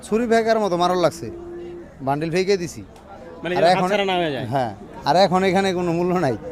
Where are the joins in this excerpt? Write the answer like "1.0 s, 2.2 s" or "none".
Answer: none